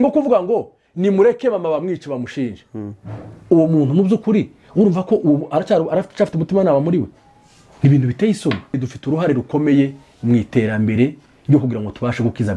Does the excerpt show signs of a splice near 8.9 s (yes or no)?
yes